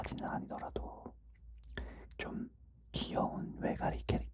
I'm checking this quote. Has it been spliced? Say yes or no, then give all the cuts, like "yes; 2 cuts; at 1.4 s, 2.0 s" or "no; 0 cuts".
no; 0 cuts